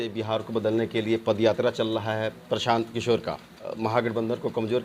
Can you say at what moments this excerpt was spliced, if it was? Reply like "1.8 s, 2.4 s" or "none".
3.8 s